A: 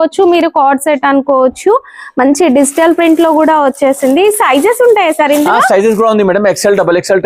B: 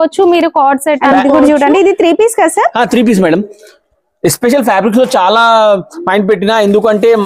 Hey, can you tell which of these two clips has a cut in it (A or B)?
B